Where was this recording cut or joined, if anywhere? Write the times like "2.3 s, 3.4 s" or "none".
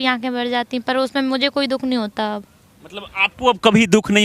none